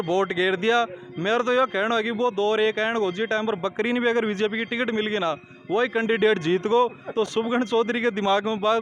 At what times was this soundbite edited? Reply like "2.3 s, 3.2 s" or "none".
none

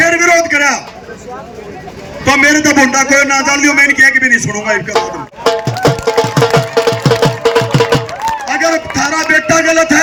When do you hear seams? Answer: none

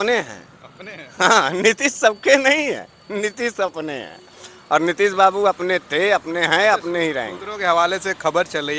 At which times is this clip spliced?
none

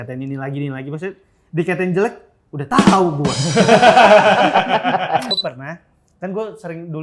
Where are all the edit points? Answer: 5.3 s

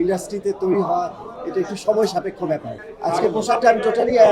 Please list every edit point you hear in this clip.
2.7 s

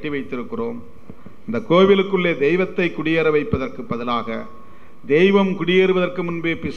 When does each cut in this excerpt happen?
none

